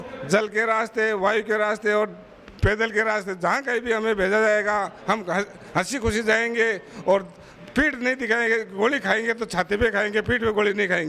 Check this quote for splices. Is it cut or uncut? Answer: uncut